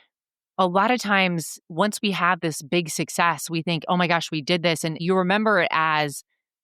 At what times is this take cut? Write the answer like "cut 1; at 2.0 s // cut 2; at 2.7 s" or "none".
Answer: cut 1; at 2.4 s // cut 2; at 4.9 s